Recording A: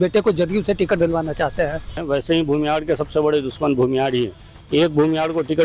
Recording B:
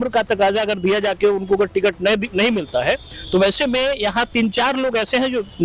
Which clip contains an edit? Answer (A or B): A